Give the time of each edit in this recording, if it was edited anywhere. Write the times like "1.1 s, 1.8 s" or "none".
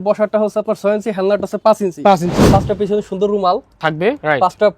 2.4 s